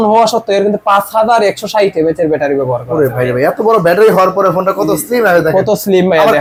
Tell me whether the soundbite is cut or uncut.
uncut